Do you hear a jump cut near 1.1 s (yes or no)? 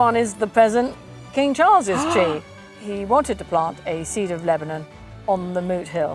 no